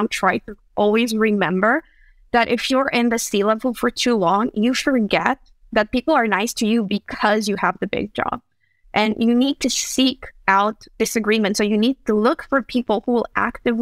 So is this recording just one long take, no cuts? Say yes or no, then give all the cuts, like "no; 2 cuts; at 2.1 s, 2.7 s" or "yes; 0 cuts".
yes; 0 cuts